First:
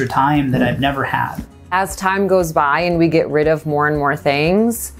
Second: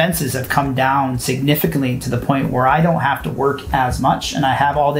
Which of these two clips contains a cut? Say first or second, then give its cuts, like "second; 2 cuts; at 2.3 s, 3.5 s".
first; 1 cut; at 1.4 s